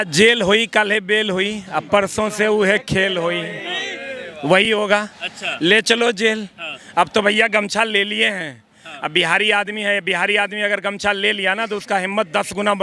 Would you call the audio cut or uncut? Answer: uncut